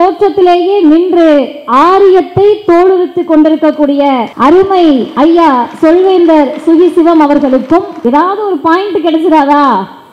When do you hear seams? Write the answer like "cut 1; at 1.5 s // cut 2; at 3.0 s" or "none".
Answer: cut 1; at 4.3 s // cut 2; at 5.1 s // cut 3; at 7.9 s